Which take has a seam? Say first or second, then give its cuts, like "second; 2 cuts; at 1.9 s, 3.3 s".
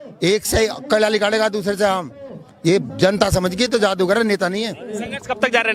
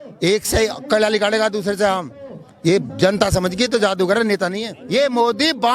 second; 1 cut; at 4.7 s